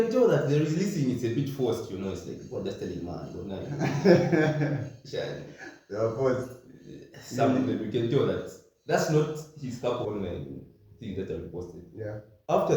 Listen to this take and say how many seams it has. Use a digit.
1